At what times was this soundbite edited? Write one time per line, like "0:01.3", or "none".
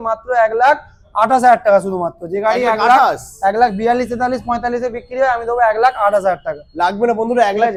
none